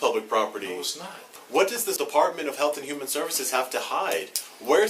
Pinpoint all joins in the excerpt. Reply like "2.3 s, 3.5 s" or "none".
1.3 s, 2.0 s